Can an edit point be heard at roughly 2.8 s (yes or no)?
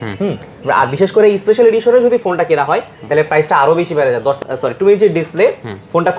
no